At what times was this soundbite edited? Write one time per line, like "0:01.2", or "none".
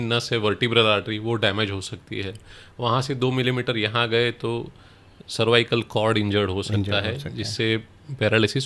none